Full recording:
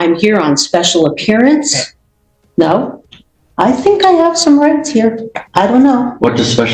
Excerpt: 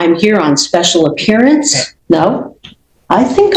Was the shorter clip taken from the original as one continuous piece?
no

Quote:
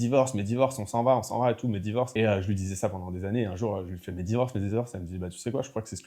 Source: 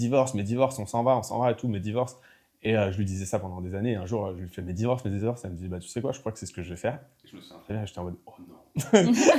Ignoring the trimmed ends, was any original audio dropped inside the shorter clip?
yes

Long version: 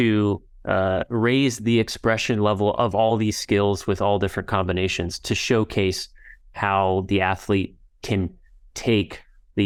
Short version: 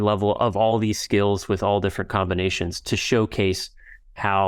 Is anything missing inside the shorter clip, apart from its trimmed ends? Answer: no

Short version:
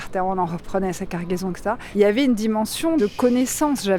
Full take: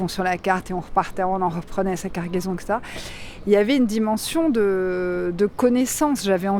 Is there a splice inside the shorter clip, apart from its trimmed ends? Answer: yes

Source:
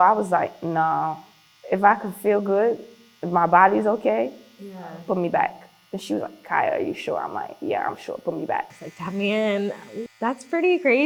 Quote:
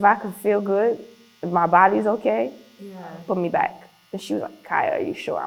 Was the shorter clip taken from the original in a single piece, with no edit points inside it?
yes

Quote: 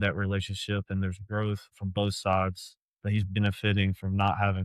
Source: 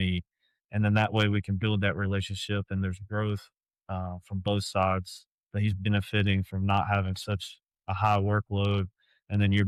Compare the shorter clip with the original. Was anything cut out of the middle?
yes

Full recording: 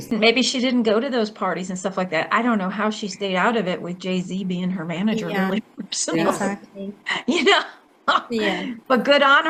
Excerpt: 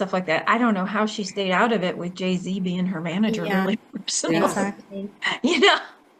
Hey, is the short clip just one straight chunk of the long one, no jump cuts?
yes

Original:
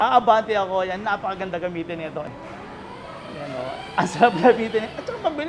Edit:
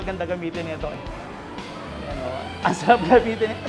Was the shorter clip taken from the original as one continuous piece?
yes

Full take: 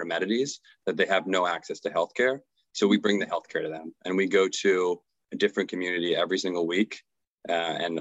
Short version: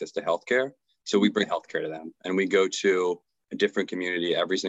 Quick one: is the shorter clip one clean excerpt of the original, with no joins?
no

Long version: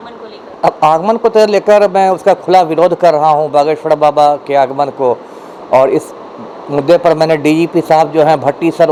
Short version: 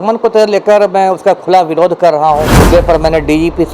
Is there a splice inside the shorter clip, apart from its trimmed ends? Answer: yes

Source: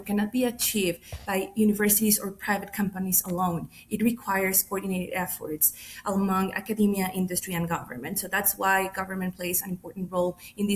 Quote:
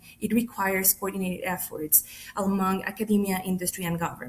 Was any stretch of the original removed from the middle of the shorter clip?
no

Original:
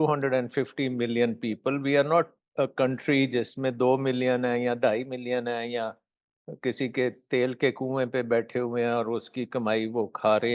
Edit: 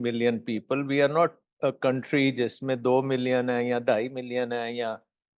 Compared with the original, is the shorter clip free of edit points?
yes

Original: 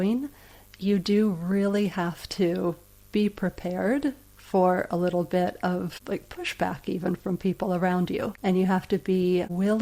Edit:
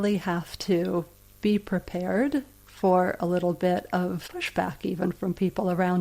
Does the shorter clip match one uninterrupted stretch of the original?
no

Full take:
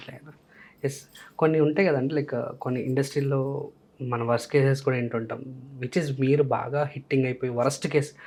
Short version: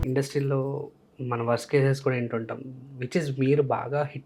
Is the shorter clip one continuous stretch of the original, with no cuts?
yes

